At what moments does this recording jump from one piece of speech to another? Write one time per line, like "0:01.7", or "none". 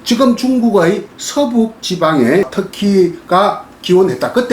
0:02.5